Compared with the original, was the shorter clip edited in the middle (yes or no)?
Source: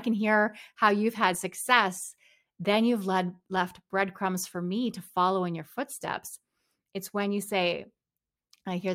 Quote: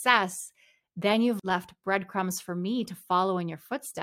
yes